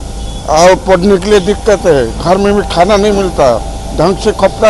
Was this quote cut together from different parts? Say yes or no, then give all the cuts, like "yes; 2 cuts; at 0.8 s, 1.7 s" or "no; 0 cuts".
no; 0 cuts